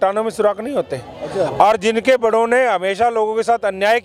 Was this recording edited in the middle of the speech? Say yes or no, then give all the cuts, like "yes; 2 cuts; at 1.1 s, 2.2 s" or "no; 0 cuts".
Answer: no; 0 cuts